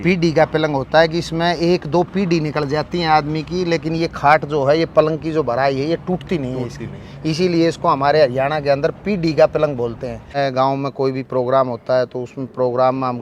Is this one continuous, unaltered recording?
no; 1 cut; at 10.3 s

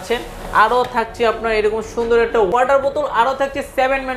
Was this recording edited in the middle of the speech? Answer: yes; 1 cut; at 2.6 s

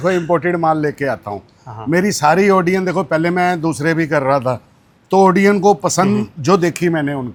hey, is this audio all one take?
yes; 0 cuts

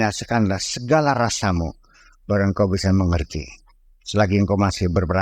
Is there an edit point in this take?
no; 0 cuts

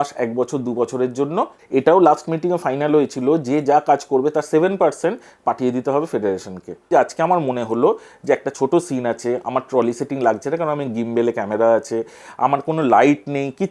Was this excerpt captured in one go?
no; 2 cuts; at 1.6 s, 6.9 s

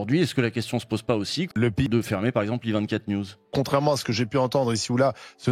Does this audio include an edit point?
yes; 2 cuts; at 1.9 s, 3.5 s

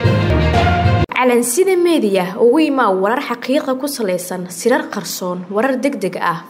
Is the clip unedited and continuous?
no; 1 cut; at 1.0 s

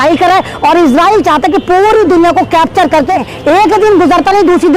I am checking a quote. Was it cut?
yes; 1 cut; at 3.3 s

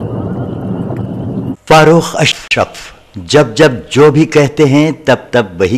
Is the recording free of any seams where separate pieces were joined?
no; 1 cut; at 1.5 s

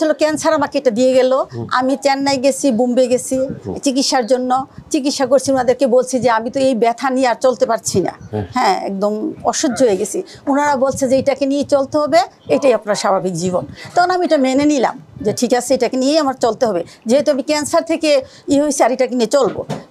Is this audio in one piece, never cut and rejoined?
yes; 0 cuts

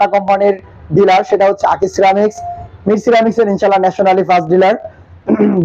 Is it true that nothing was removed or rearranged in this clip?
yes; 0 cuts

